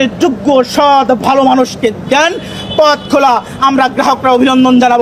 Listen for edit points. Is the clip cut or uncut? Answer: uncut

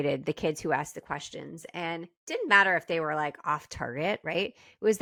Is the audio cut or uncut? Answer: uncut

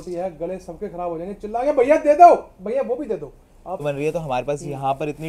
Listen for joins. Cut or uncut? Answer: cut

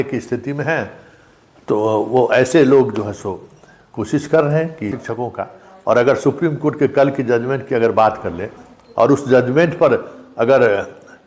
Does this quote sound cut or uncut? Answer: cut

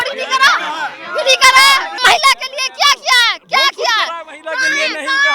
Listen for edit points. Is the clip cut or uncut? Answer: cut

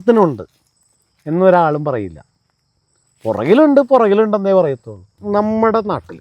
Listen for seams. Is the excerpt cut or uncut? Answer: cut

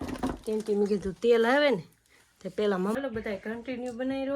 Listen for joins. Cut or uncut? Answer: cut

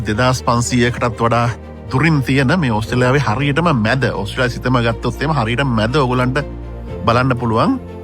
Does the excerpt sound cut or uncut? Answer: uncut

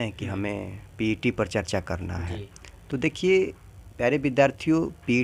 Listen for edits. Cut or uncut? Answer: uncut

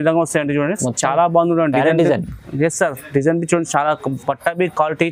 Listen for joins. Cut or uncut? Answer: uncut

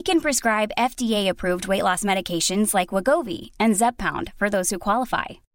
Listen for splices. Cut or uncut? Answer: uncut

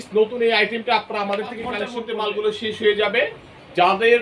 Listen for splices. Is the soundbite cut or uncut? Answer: cut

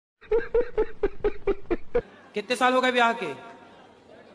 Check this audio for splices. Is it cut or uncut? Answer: uncut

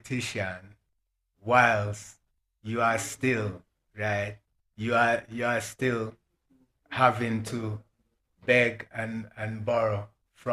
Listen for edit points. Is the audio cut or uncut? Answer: uncut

